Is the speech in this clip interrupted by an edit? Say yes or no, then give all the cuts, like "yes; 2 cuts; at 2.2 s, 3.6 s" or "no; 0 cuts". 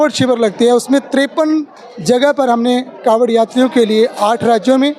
no; 0 cuts